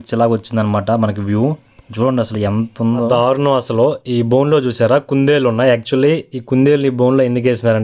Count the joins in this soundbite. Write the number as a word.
one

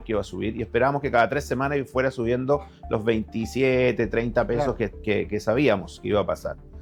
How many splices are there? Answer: zero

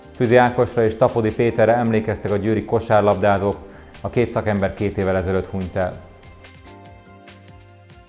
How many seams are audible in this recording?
one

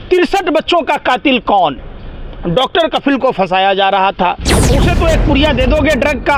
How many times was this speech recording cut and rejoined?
one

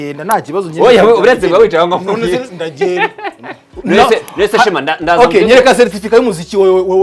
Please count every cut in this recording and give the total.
one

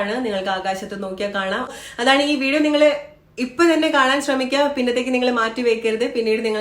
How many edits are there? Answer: one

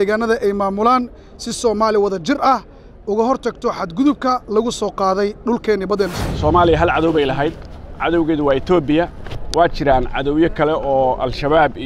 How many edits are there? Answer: one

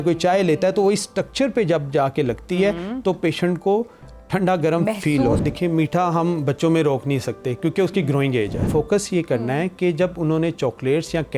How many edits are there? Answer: two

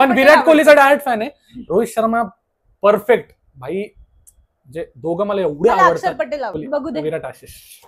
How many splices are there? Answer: one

